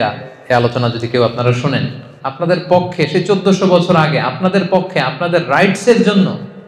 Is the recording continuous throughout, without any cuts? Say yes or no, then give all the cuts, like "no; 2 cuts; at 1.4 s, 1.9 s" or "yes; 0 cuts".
no; 1 cut; at 2.2 s